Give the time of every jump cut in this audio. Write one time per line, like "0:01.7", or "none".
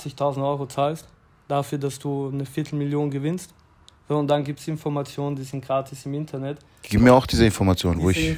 none